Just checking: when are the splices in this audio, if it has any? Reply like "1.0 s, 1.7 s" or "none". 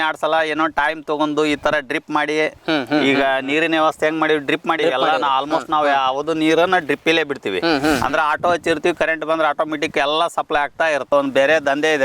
11.1 s